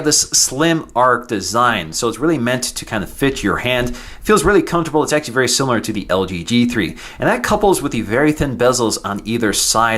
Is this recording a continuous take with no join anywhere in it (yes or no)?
no